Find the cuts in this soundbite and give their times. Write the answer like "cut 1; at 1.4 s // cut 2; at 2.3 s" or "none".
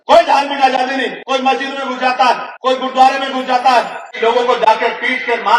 cut 1; at 1.2 s // cut 2; at 2.5 s // cut 3; at 4.0 s

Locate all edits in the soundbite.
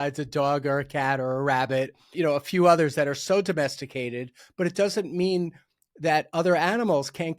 cut 1; at 2.1 s // cut 2; at 4.4 s

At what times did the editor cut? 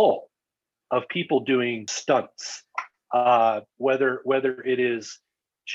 cut 1; at 1.9 s

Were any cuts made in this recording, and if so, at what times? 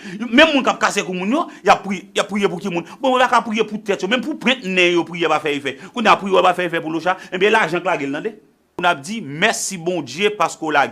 cut 1; at 8.8 s

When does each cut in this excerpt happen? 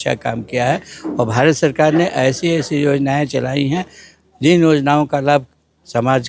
none

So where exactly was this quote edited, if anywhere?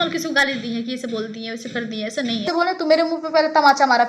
cut 1; at 2.5 s

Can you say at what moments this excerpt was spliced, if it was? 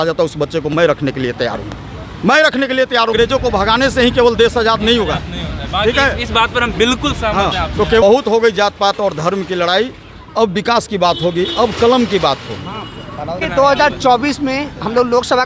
cut 1; at 3.1 s // cut 2; at 8.0 s // cut 3; at 13.4 s

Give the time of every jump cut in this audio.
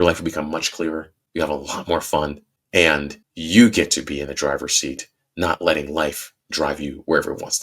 cut 1; at 1.2 s // cut 2; at 2.7 s

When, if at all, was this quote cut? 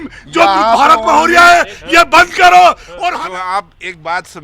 cut 1; at 2.9 s

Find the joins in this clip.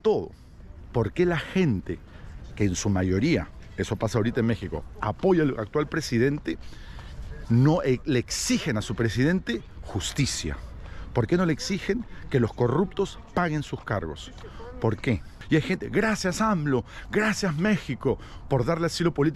cut 1; at 15.3 s

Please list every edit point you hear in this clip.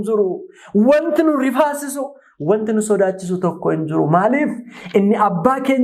none

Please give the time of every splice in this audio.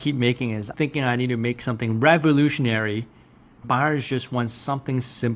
cut 1; at 3.6 s

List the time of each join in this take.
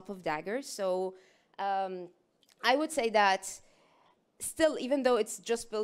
none

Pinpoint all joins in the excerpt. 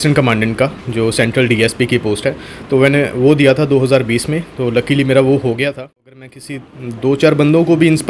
cut 1; at 6.1 s

